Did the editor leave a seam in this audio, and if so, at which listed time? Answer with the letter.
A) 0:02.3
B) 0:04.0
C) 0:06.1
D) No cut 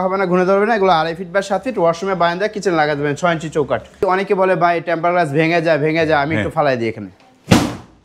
B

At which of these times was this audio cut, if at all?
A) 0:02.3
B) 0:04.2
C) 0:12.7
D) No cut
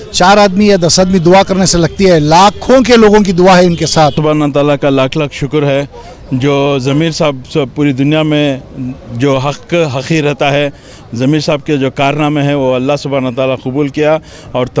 B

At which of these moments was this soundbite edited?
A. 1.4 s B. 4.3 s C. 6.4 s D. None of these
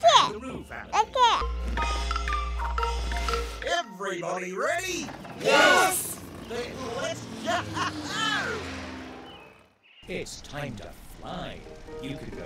A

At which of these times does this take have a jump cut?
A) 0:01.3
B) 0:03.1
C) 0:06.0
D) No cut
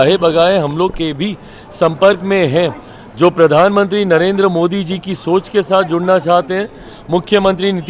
D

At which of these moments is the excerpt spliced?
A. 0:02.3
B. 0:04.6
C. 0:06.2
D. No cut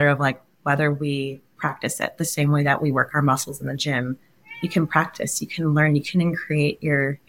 D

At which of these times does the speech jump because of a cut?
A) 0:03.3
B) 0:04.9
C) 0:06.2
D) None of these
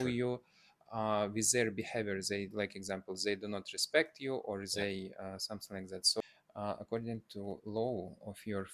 C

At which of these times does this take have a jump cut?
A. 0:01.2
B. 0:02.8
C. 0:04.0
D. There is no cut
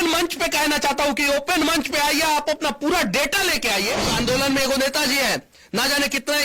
C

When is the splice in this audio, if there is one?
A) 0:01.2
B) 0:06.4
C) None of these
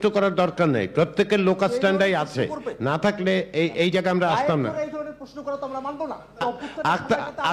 B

